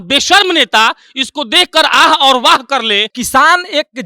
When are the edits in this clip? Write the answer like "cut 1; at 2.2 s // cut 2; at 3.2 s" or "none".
cut 1; at 3.1 s